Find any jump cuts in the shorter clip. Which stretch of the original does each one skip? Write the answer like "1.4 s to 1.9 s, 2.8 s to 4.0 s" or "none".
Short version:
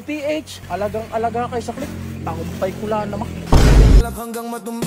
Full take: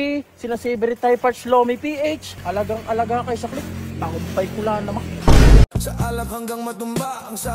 5.7 s to 6.1 s